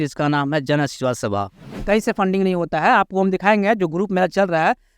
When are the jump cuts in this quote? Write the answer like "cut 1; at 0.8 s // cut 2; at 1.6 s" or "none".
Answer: cut 1; at 1.8 s